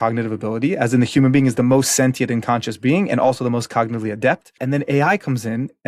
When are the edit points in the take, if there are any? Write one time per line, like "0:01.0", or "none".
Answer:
0:04.6